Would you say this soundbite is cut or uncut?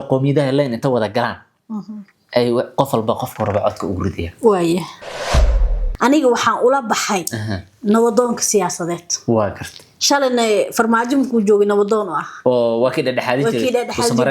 cut